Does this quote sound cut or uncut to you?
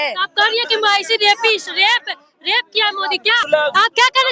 cut